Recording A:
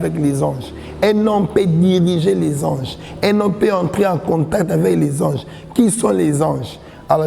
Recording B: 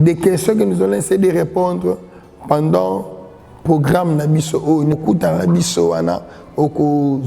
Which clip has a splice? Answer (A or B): B